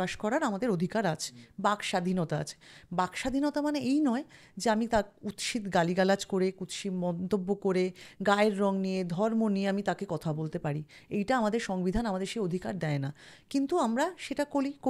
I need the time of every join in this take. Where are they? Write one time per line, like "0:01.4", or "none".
none